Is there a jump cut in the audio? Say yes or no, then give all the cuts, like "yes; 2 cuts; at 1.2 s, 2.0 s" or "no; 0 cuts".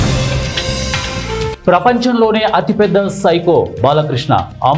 yes; 1 cut; at 1.6 s